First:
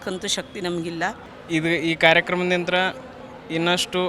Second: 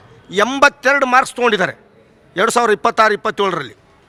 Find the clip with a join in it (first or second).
first